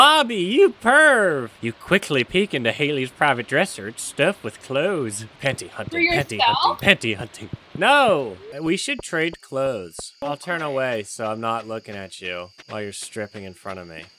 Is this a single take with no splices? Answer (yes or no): no